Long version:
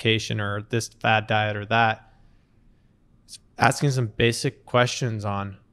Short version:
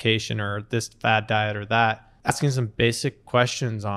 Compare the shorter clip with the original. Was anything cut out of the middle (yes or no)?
yes